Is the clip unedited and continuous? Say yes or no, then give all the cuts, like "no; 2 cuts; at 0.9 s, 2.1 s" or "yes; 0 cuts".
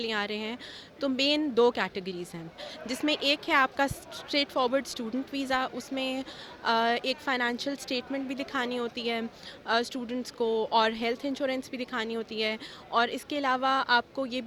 yes; 0 cuts